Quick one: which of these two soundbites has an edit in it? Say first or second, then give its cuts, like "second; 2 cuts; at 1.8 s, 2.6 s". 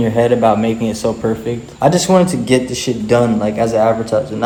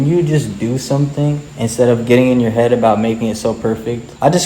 second; 1 cut; at 1.5 s